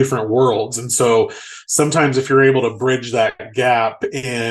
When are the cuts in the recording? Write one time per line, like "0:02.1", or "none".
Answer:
none